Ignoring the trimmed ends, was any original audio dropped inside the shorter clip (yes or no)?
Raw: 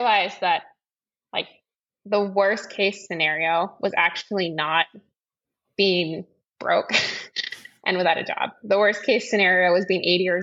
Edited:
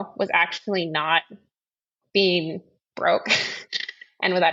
no